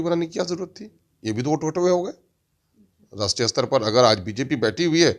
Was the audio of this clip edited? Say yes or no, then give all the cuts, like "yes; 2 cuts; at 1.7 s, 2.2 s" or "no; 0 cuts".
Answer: no; 0 cuts